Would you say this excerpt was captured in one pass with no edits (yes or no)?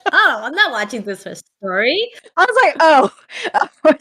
no